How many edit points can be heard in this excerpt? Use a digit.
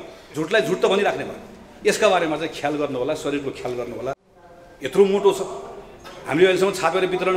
1